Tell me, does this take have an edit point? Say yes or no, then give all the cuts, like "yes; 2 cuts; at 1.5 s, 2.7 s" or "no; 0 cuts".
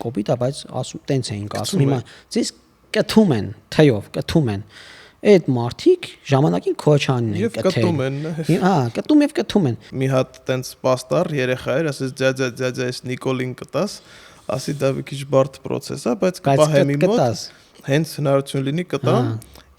yes; 1 cut; at 9.9 s